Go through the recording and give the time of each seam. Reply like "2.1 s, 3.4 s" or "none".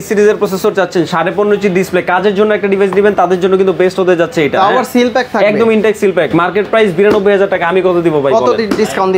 none

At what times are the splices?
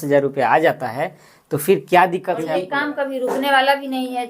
2.6 s

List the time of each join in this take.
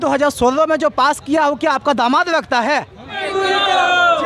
3.2 s

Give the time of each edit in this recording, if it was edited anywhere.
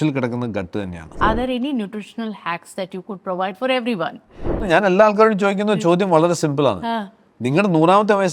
1.1 s, 4.6 s

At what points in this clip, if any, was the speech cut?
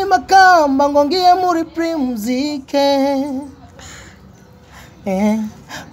none

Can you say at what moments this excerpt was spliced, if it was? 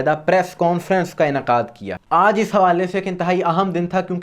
1.8 s

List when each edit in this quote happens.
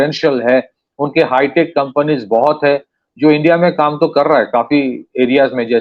none

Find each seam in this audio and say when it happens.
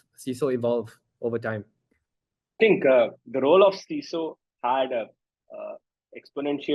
2.6 s

